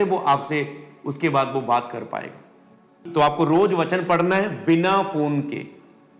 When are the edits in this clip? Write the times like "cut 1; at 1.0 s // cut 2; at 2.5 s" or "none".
cut 1; at 3.0 s